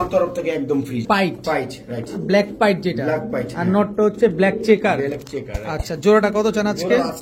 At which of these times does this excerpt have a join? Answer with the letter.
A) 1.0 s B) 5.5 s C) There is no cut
A